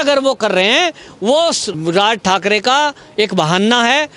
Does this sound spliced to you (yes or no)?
yes